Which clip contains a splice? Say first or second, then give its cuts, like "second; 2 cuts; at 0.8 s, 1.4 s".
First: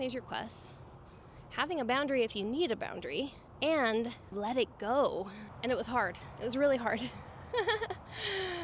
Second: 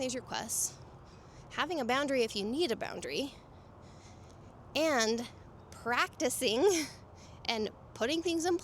first; 3 cuts; at 3.4 s, 4.3 s, 5.4 s